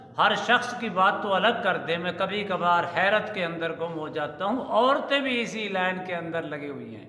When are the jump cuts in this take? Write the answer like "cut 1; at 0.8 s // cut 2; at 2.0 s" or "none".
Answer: none